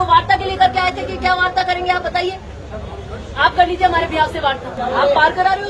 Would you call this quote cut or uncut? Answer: cut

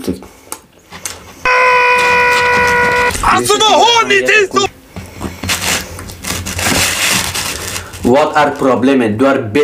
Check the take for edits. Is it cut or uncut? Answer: cut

